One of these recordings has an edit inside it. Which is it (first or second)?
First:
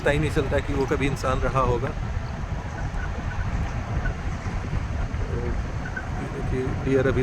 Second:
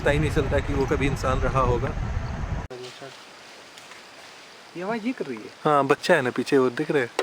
second